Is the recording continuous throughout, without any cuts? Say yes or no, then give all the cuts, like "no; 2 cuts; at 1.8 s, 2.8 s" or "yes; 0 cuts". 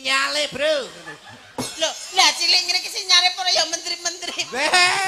yes; 0 cuts